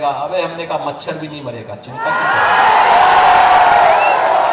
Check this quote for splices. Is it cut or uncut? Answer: uncut